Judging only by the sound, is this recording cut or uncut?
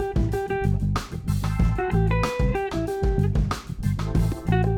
uncut